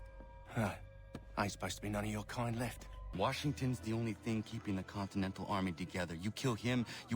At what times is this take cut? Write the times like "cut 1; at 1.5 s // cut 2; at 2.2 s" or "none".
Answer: cut 1; at 3.1 s